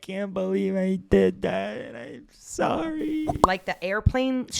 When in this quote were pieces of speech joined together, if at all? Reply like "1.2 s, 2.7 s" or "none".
3.4 s